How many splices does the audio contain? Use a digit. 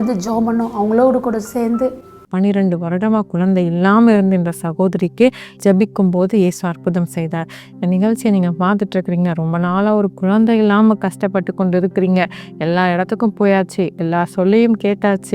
2